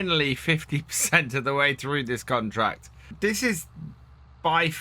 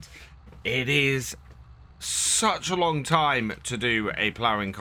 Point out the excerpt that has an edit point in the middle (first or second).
first